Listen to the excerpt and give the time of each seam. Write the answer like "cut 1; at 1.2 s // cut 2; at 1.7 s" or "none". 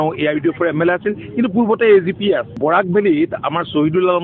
none